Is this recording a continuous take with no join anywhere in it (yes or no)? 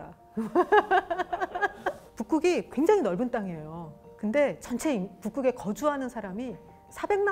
yes